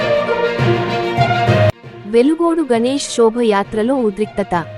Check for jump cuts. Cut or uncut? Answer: cut